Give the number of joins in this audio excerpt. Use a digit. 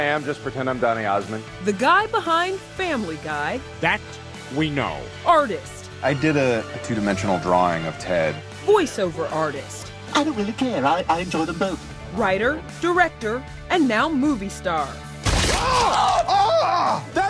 1